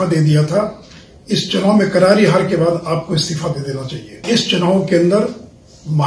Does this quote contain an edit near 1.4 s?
no; 1 cut; at 4.2 s

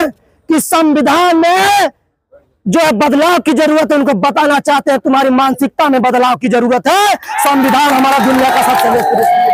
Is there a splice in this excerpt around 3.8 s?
no; 0 cuts

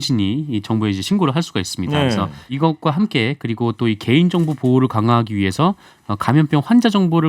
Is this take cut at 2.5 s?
yes; 1 cut; at 2.5 s

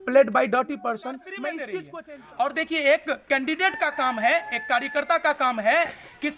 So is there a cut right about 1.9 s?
yes; 1 cut; at 1.9 s

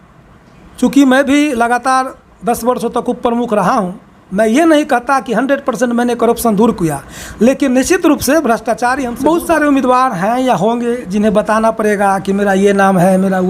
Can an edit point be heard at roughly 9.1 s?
yes; 1 cut; at 9.1 s

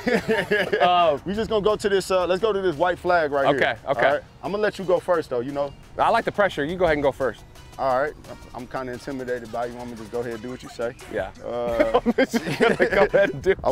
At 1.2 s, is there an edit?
yes; 1 cut; at 1.2 s

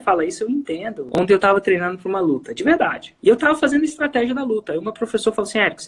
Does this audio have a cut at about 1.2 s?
yes; 2 cuts; at 1.2 s, 3.1 s

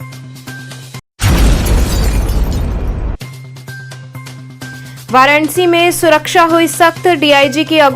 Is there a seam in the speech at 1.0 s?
yes; 2 cuts; at 1.0 s, 4.7 s

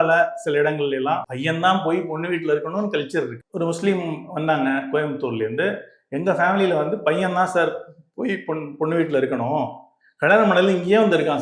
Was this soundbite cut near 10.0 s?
no; 2 cuts; at 1.3 s, 3.4 s

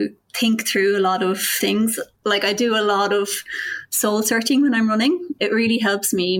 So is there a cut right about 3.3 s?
no; 1 cut; at 5.3 s

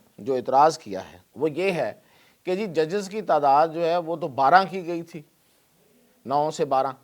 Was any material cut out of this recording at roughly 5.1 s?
no; 1 cut; at 1.2 s

